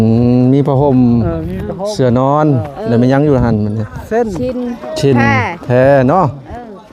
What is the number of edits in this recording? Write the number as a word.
zero